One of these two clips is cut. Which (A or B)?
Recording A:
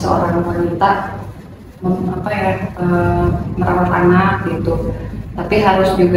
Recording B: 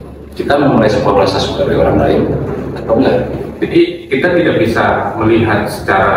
B